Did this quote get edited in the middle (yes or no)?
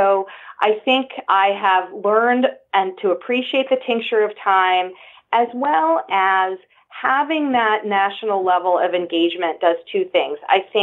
yes